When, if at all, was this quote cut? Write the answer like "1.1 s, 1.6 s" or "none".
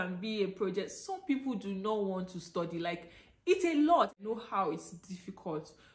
4.2 s